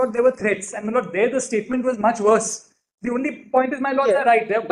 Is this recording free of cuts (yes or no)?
yes